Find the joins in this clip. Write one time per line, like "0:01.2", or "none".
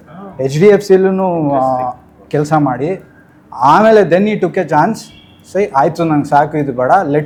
none